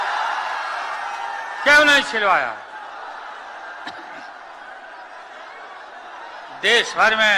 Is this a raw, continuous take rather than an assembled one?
yes; 0 cuts

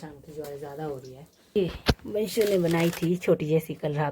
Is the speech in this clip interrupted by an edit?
yes; 1 cut; at 1.6 s

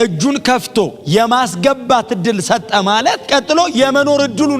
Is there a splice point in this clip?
yes; 1 cut; at 3.2 s

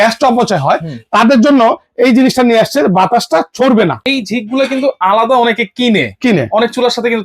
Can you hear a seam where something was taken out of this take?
yes; 1 cut; at 4.0 s

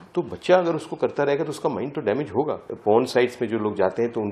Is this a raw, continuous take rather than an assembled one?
no; 1 cut; at 2.7 s

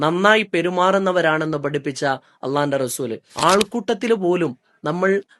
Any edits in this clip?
yes; 1 cut; at 3.2 s

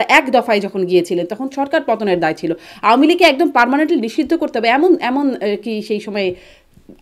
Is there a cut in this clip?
no; 0 cuts

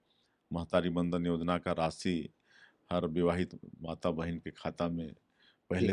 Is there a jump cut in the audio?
no; 0 cuts

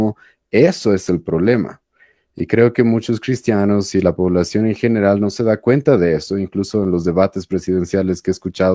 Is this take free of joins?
yes; 0 cuts

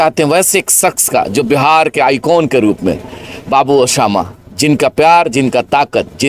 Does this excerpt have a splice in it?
no; 0 cuts

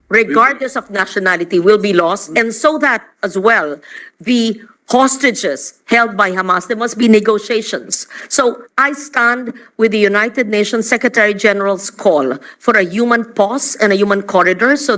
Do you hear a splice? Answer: no; 0 cuts

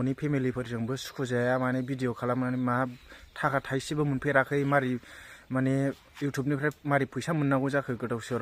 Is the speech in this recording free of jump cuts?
yes; 0 cuts

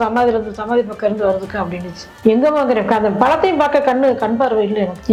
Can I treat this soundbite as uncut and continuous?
yes; 0 cuts

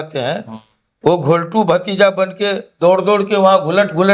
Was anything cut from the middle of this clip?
no; 0 cuts

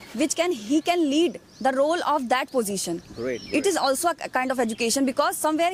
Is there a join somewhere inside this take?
no; 0 cuts

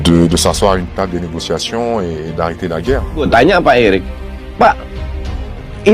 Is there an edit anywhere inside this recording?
no; 0 cuts

